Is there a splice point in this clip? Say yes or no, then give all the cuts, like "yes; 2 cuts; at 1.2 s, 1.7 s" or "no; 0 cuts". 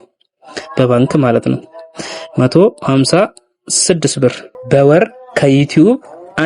yes; 1 cut; at 4.5 s